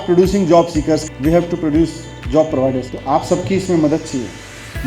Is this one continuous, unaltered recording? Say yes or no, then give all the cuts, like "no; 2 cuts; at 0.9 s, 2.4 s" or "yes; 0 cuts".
yes; 0 cuts